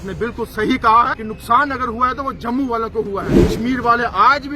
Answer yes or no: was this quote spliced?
yes